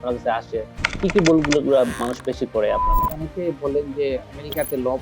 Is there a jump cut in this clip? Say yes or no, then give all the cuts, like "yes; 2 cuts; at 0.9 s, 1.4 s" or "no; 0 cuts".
yes; 1 cut; at 3.3 s